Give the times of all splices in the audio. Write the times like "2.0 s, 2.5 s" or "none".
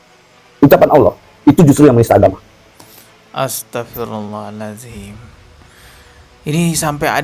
none